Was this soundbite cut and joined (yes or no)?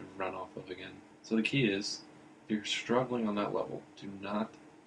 yes